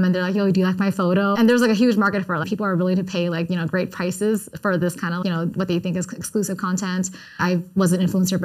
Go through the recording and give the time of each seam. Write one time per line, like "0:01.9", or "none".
0:01.3
0:02.5
0:05.2
0:07.4